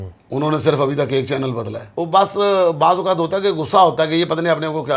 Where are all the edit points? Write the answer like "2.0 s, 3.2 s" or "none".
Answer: 1.9 s